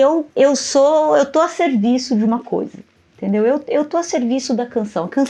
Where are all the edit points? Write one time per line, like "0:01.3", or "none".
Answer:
none

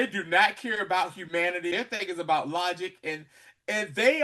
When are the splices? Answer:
0:01.7

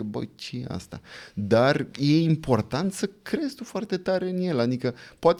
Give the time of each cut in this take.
none

